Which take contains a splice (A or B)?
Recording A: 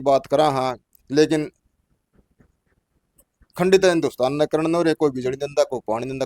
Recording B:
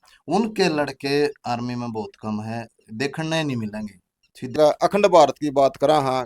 B